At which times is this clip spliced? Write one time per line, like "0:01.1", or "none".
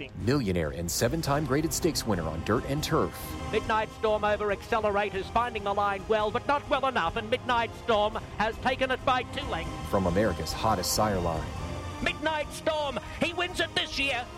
none